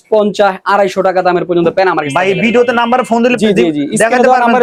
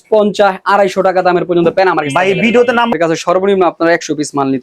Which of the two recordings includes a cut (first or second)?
second